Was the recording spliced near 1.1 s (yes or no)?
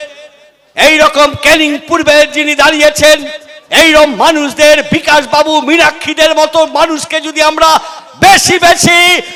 no